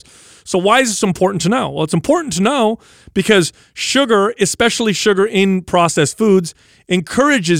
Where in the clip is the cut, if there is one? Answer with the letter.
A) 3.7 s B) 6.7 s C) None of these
C